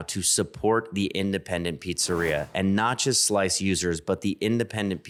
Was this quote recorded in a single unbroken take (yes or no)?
yes